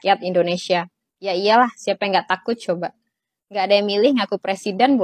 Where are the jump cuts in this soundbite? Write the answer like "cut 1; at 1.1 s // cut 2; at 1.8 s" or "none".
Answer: none